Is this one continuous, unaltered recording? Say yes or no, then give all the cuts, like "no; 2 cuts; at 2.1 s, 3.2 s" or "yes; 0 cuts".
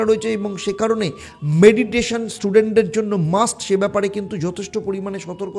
yes; 0 cuts